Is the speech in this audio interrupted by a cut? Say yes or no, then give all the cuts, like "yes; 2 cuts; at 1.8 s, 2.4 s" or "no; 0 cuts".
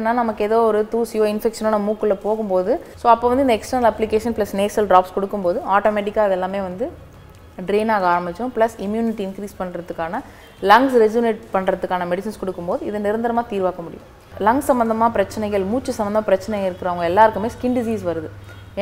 yes; 2 cuts; at 2.9 s, 14.3 s